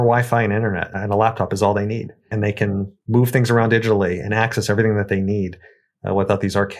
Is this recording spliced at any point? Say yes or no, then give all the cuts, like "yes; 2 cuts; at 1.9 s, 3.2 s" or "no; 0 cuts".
yes; 2 cuts; at 1.0 s, 2.3 s